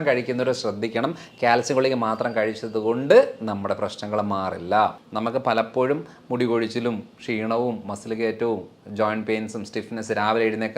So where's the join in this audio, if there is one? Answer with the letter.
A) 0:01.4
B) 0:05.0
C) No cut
B